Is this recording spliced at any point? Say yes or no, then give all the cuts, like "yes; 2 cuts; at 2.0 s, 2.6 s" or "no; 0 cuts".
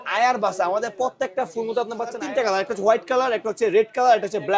yes; 1 cut; at 2.2 s